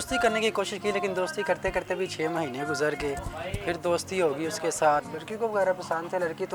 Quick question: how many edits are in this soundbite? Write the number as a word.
one